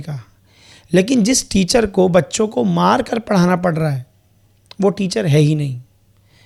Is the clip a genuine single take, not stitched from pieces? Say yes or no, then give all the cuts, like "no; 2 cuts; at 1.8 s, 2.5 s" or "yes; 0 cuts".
yes; 0 cuts